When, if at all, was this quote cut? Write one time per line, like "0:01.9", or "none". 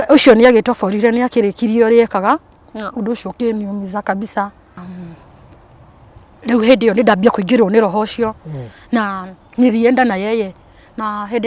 0:04.8